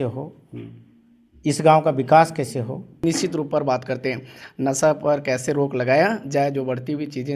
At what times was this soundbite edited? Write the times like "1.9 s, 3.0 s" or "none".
3.0 s